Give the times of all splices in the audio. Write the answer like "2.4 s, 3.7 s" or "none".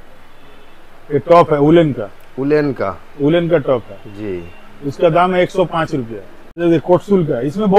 6.6 s